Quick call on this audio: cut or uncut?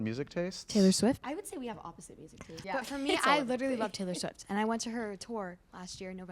cut